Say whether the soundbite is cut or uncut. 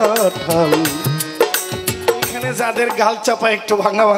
cut